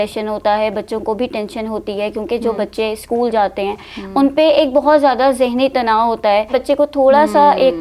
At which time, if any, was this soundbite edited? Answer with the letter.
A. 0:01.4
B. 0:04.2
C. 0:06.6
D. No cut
C